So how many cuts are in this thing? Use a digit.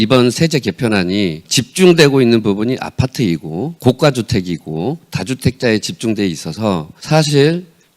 3